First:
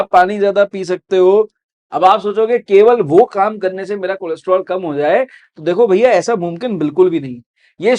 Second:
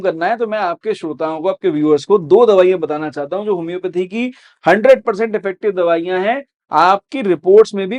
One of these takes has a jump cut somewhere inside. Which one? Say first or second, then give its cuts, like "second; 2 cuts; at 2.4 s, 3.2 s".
first; 1 cut; at 1.7 s